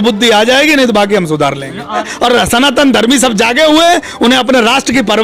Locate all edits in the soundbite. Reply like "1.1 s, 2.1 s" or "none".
2.1 s